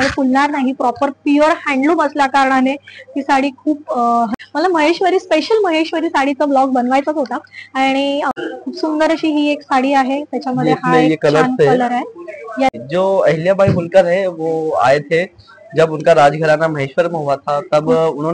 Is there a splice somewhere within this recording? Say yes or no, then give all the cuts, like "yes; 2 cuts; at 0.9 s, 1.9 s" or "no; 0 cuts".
yes; 3 cuts; at 4.3 s, 8.3 s, 12.7 s